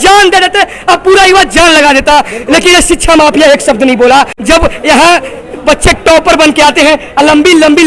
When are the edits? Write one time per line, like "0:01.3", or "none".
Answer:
0:04.3